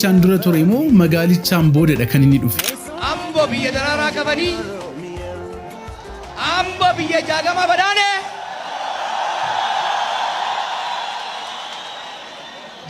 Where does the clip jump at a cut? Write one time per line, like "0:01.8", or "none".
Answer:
0:02.6